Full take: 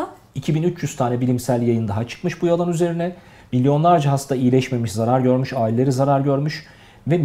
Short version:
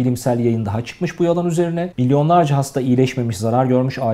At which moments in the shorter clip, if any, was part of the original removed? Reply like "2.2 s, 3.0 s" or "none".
1.9 s